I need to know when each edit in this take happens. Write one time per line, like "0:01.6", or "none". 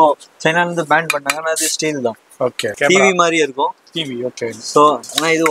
0:02.7

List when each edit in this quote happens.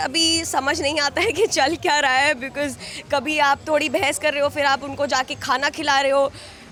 none

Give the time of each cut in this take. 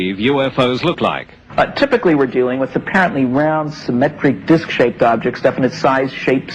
0:03.1

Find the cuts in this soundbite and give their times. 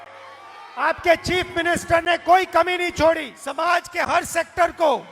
0:03.4

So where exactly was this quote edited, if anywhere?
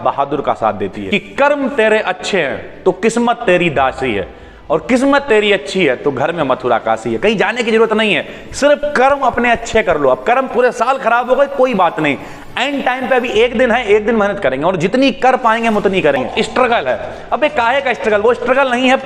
0:00.9
0:16.3

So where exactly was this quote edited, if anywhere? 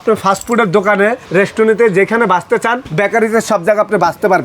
0:01.2
0:02.8

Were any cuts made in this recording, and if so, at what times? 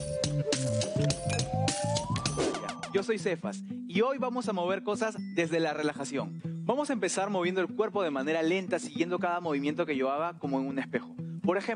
0:02.7

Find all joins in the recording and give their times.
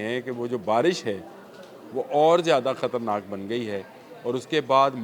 none

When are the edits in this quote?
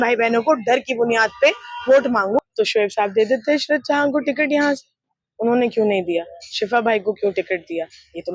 0:02.4

